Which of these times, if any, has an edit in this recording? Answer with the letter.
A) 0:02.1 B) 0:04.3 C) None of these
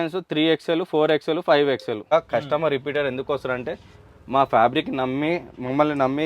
A